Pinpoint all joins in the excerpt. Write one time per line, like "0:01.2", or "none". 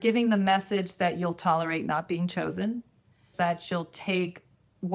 0:03.3